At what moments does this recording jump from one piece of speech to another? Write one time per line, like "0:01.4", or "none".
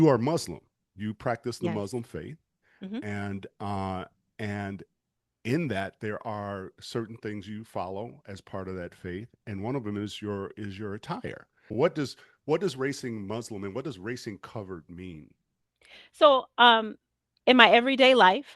0:11.7